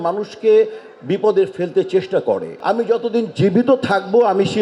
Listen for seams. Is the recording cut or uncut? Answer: cut